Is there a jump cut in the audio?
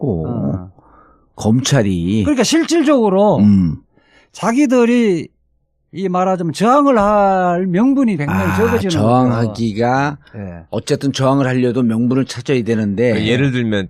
yes; 1 cut; at 9.2 s

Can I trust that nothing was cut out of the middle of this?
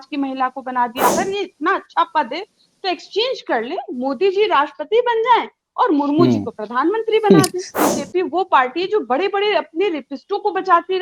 no; 2 cuts; at 1.1 s, 7.8 s

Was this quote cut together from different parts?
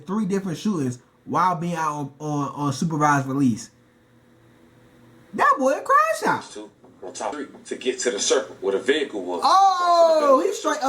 yes; 1 cut; at 7.4 s

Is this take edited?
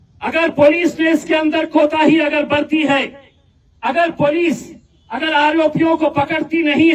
no; 0 cuts

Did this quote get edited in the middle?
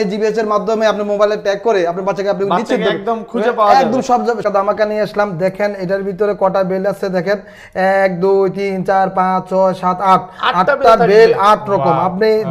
yes; 1 cut; at 4.4 s

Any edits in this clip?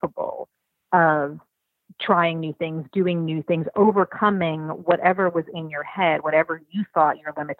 no; 0 cuts

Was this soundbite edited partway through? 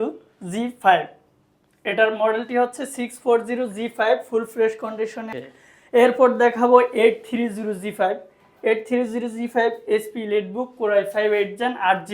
yes; 1 cut; at 5.3 s

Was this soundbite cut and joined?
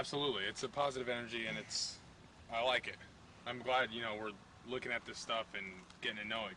yes; 1 cut; at 4.3 s

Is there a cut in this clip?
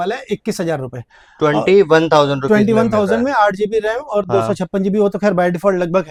no; 0 cuts

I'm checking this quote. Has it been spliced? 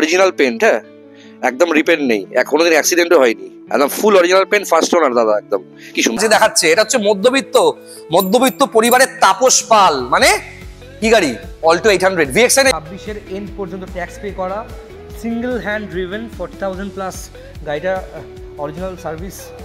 yes; 2 cuts; at 6.2 s, 12.7 s

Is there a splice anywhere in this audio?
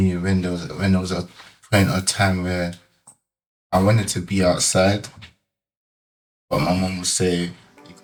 no; 0 cuts

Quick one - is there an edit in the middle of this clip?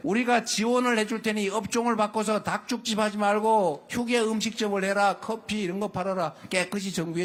no; 0 cuts

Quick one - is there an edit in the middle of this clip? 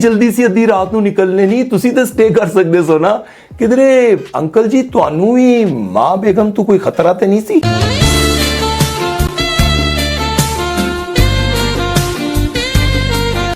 no; 0 cuts

